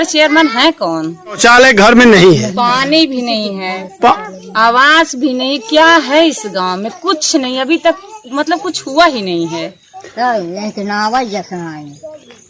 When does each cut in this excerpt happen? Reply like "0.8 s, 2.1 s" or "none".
1.4 s

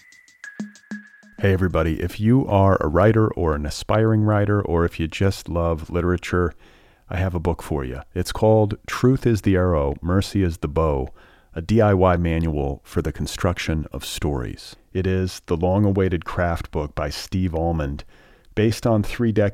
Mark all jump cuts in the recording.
1.1 s

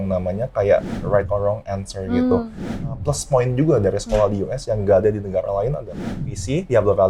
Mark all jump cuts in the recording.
2.7 s, 5.9 s

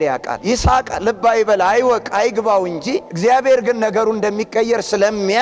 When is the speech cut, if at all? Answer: none

